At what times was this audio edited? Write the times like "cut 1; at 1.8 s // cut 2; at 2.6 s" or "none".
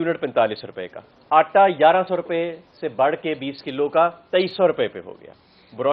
none